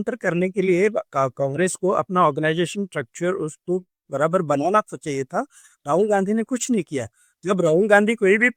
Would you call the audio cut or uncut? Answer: uncut